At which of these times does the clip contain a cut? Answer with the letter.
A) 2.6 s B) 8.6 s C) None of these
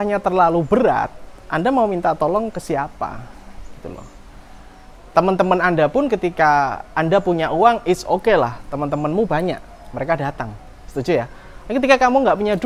C